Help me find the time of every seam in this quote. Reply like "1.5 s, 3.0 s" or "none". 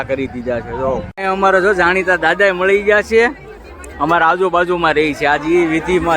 1.2 s